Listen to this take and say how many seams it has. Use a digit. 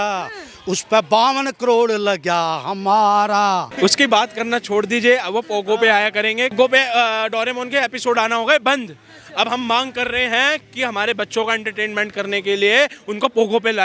2